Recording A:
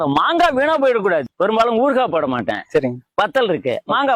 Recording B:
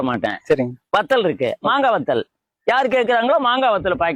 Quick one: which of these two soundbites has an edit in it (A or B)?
A